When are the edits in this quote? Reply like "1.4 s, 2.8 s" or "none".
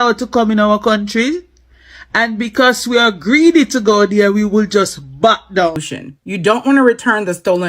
5.8 s